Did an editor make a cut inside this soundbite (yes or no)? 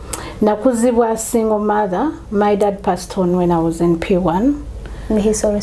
no